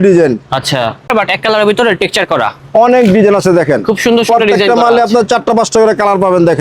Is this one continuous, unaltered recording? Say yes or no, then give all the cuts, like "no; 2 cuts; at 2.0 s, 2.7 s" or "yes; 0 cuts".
no; 1 cut; at 1.1 s